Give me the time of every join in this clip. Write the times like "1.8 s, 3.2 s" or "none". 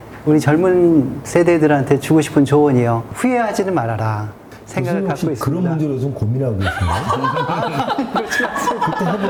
none